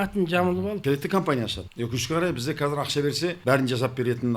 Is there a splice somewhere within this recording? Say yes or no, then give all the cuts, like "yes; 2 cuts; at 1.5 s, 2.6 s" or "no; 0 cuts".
yes; 3 cuts; at 0.8 s, 1.6 s, 3.4 s